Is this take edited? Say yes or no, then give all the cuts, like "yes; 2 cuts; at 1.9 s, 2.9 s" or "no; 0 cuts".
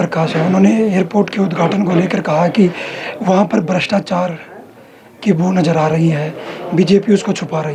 no; 0 cuts